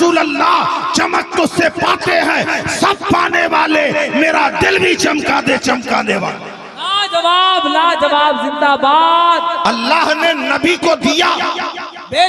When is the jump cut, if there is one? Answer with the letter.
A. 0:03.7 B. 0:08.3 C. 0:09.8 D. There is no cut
C